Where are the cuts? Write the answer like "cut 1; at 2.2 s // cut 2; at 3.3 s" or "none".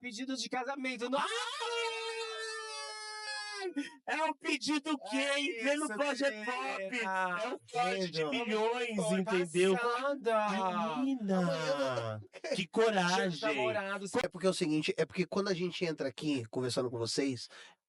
none